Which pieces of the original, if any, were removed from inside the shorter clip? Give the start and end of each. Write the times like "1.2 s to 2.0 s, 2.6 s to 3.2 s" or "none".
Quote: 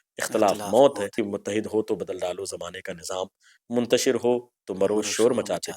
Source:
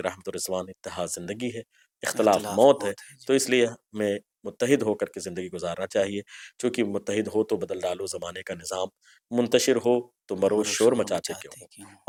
3.0 s to 6.7 s